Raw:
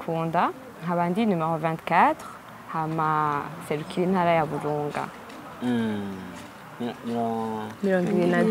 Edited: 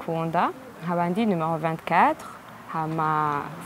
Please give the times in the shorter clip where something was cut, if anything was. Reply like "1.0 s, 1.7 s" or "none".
none